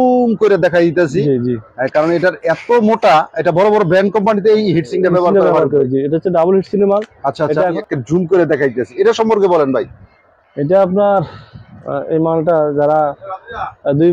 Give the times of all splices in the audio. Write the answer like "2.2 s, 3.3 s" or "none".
7.8 s